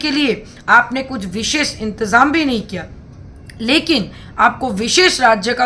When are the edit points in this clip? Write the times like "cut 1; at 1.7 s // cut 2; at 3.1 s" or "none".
none